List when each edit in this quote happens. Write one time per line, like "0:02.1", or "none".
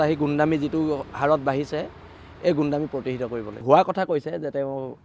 0:03.6